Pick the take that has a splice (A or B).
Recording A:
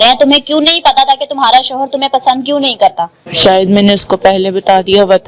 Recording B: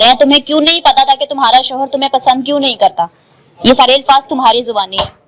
A